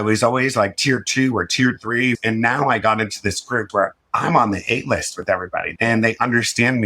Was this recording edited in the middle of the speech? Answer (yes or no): yes